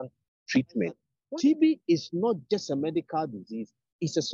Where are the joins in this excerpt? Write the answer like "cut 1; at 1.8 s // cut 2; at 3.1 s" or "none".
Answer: cut 1; at 1.1 s